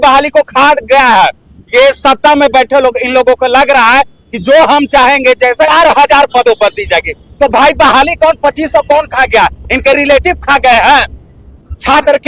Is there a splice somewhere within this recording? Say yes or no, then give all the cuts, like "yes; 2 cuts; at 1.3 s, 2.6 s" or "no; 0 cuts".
yes; 1 cut; at 5.7 s